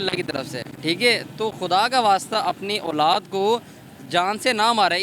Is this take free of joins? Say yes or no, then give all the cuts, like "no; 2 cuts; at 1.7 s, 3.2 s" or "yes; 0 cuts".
yes; 0 cuts